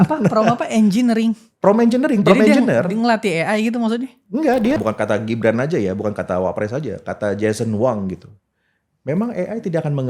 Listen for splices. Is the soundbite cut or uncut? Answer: cut